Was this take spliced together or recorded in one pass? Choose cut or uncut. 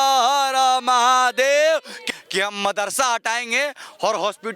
cut